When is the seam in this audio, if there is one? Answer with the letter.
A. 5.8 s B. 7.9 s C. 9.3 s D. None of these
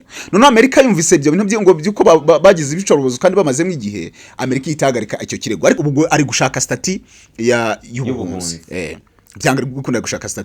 A